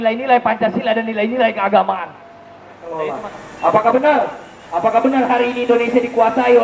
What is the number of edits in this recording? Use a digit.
1